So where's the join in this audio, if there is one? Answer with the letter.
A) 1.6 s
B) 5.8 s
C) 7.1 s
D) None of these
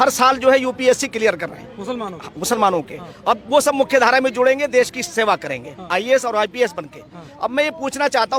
D